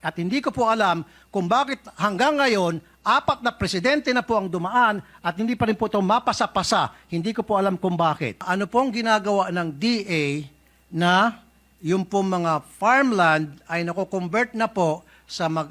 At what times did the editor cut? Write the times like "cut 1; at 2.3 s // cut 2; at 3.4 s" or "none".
cut 1; at 8.5 s